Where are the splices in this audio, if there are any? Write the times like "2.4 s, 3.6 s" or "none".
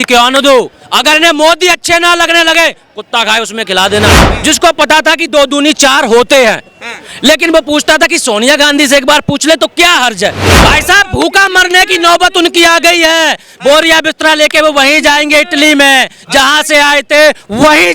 4.2 s, 10.5 s